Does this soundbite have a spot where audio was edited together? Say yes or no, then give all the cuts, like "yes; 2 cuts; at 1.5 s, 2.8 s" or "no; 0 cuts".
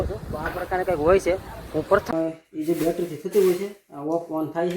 yes; 1 cut; at 2.1 s